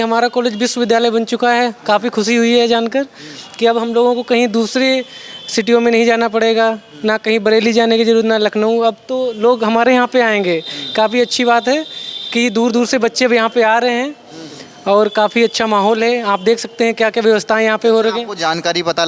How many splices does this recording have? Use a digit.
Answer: 0